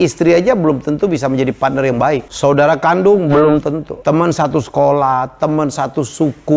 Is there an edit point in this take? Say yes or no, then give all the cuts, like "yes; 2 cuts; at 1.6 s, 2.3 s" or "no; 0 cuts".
yes; 2 cuts; at 2.3 s, 3.9 s